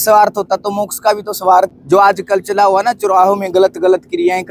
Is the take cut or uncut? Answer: cut